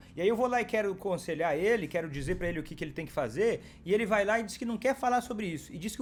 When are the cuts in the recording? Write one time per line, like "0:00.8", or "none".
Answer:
none